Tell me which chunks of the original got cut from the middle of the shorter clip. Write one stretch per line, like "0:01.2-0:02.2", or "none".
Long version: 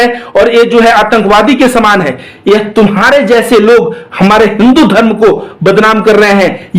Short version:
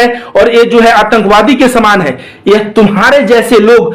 none